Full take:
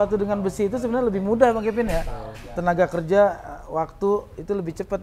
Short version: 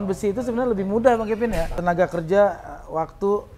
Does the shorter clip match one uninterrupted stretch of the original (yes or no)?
no